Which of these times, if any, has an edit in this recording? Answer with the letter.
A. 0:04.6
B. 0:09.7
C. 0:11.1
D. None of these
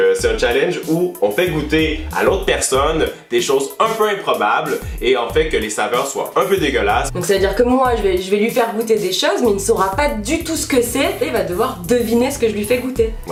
D